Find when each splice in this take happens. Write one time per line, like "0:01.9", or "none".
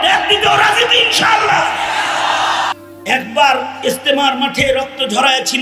0:02.8